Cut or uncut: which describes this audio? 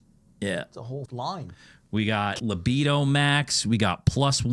cut